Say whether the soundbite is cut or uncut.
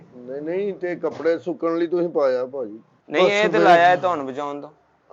uncut